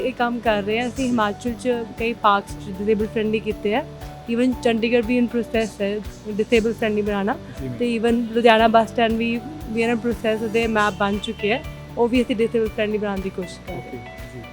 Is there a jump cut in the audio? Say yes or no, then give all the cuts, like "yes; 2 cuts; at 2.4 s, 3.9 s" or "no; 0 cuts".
no; 0 cuts